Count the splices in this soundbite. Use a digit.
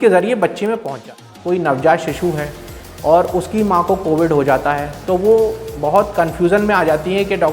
1